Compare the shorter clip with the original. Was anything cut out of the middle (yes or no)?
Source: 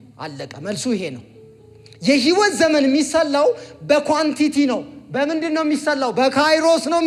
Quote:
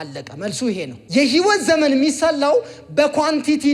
yes